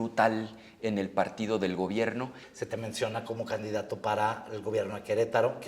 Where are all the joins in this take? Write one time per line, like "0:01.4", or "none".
0:02.4